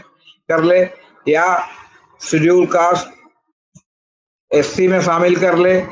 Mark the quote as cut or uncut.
uncut